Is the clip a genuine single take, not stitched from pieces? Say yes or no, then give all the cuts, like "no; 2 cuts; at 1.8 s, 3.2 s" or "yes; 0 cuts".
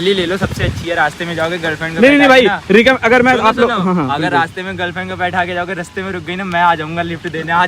yes; 0 cuts